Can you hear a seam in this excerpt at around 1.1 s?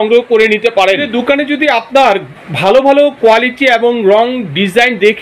yes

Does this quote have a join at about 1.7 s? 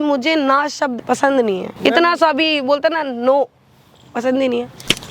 yes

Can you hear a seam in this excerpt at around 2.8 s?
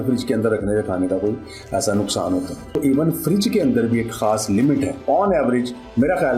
yes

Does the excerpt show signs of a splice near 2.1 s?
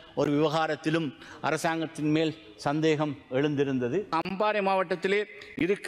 no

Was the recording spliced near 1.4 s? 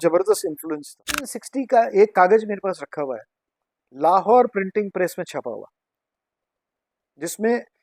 yes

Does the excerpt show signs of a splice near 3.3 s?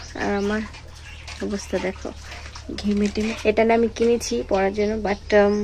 yes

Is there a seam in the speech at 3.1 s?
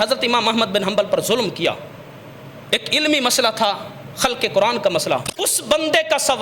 no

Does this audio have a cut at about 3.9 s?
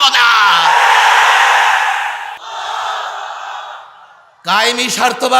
no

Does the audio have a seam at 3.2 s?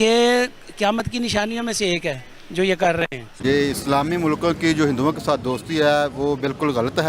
yes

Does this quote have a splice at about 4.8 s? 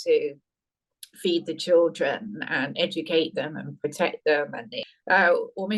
yes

